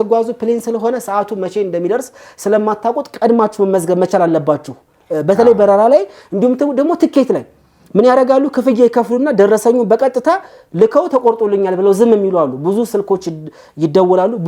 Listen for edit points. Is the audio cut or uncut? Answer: uncut